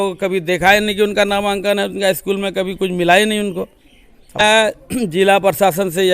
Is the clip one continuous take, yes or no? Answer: no